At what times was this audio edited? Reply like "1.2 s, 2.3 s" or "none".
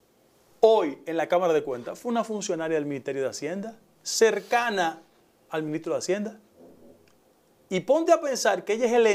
none